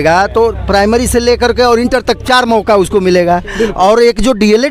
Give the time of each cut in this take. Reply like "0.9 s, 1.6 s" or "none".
none